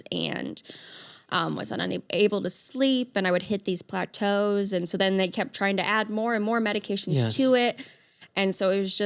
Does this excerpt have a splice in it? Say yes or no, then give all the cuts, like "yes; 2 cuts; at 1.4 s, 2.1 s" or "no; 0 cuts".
no; 0 cuts